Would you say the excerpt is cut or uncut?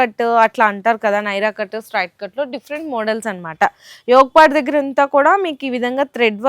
uncut